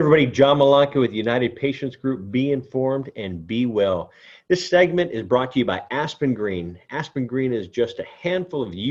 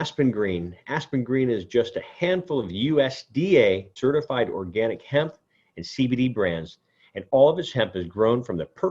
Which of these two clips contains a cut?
second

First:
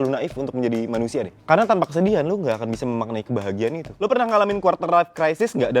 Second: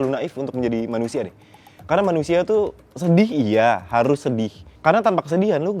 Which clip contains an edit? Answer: first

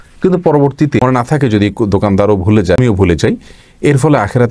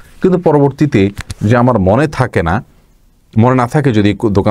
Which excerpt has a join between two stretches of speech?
first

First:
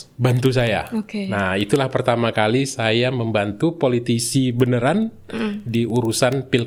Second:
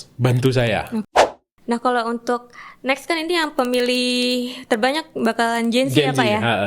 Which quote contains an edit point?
second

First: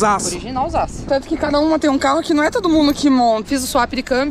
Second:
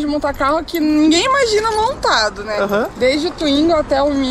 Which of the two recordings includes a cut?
first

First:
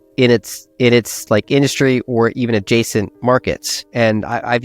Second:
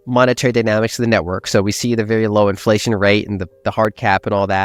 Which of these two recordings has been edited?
first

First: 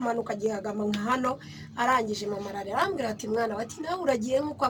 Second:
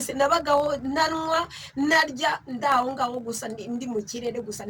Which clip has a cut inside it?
second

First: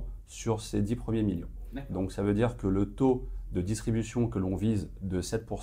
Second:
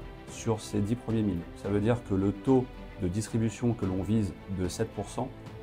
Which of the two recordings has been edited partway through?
second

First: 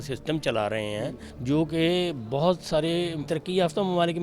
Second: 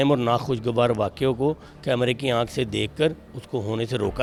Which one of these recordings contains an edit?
first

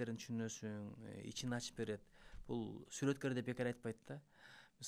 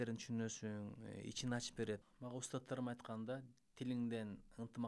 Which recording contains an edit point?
second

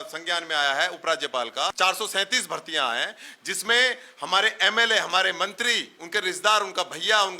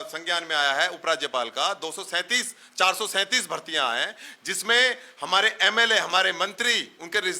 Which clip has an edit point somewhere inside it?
first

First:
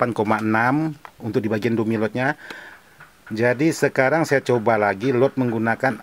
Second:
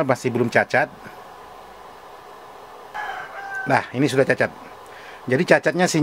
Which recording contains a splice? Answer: second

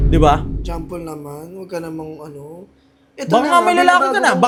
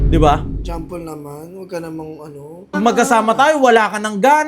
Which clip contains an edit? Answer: second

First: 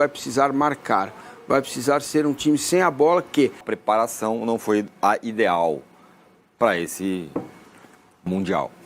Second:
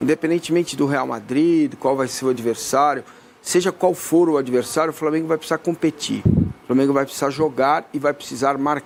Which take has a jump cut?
first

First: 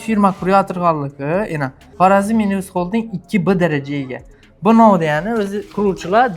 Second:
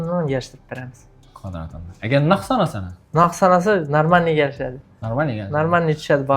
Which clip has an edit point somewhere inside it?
first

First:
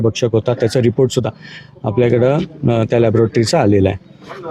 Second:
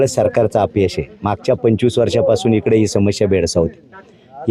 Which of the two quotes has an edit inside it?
first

